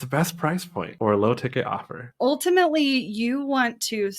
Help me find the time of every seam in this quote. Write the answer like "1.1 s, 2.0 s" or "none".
0.9 s, 2.1 s

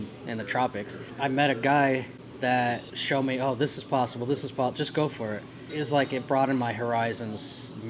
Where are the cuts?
none

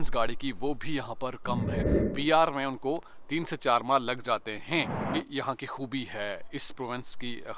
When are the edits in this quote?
2.0 s, 5.2 s

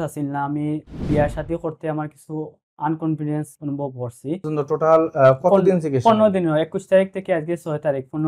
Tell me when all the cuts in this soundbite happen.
4.5 s

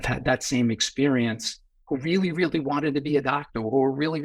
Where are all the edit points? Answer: none

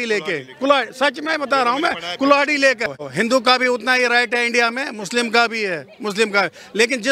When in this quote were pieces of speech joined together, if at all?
none

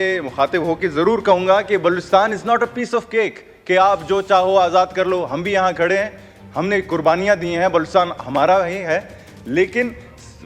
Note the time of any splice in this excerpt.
none

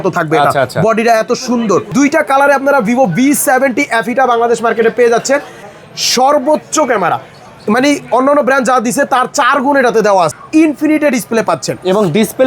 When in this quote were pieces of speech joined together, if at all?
1.9 s, 5.7 s, 10.4 s

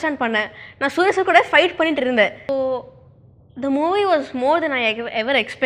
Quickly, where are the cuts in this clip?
2.4 s

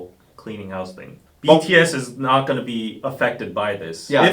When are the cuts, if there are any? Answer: 1.3 s

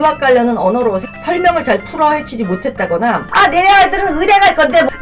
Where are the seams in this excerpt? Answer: 3.3 s

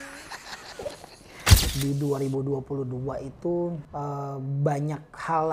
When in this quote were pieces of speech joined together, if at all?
1.5 s, 3.8 s

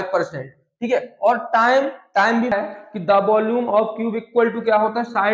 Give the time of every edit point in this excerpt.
2.5 s

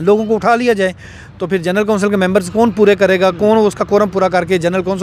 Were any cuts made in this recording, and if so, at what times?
none

